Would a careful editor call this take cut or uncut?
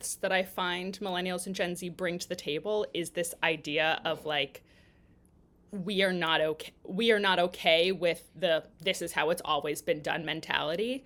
uncut